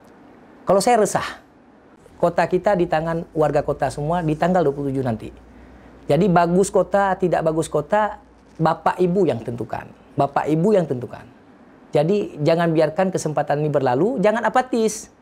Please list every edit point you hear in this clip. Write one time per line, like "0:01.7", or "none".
0:02.0

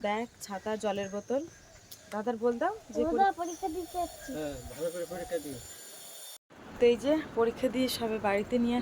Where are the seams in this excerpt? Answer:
0:06.6

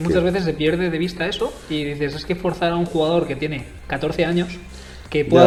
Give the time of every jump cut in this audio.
none

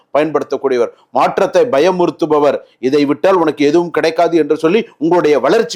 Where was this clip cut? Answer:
none

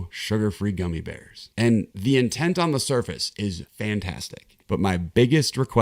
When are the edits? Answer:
0:04.6

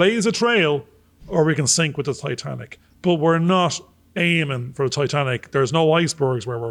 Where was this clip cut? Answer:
none

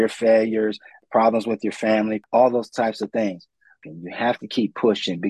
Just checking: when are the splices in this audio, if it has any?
0:02.2
0:03.8

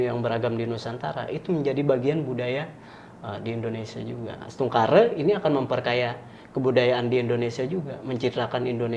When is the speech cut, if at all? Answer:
none

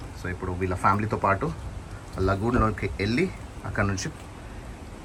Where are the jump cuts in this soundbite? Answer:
none

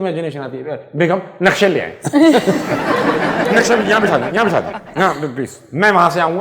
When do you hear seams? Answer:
0:03.5

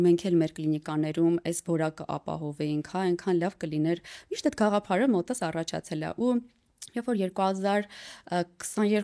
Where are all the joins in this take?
none

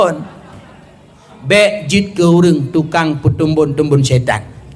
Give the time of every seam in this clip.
0:01.2

